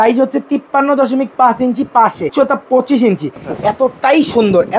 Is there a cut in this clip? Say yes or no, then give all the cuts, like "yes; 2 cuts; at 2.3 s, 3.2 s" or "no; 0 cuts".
yes; 2 cuts; at 2.3 s, 3.4 s